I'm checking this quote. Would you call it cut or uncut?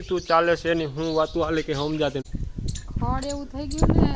cut